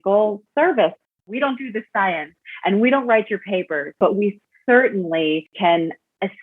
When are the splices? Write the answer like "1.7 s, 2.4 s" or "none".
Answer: 1.2 s, 4.0 s, 5.5 s